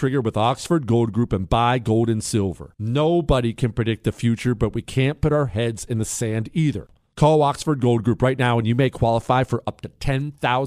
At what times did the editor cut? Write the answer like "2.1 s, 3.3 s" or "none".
6.8 s

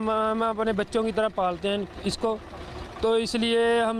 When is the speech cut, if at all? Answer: none

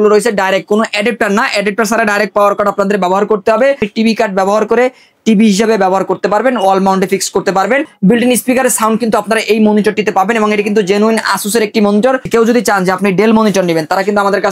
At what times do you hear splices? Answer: 3.9 s, 7.9 s, 12.3 s

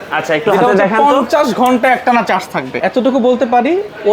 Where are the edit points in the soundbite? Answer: 2.7 s

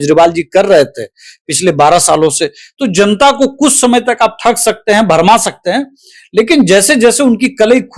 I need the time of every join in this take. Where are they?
none

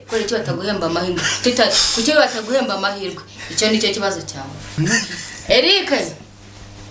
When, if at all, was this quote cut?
4.7 s

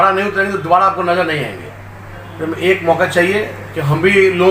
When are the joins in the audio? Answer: none

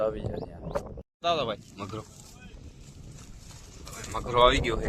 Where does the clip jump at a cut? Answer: 1.1 s

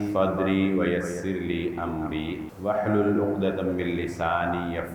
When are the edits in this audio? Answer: 2.5 s

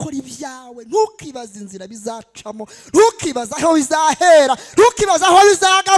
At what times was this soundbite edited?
none

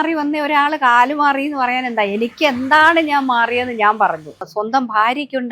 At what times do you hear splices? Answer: 4.5 s

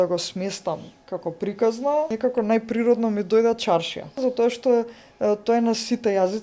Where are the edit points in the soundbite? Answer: 2.1 s, 4.2 s

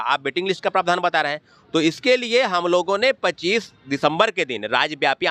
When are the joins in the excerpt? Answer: none

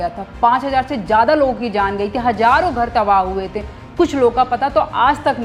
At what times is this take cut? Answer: none

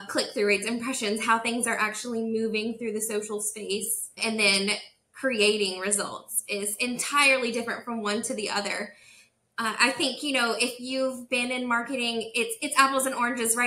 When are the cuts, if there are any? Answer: 4.2 s

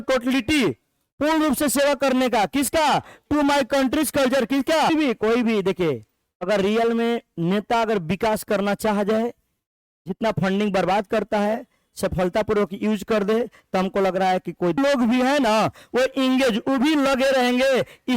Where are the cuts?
4.9 s, 14.8 s

